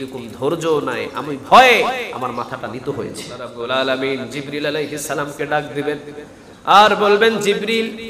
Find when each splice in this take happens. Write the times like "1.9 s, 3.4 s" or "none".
3.5 s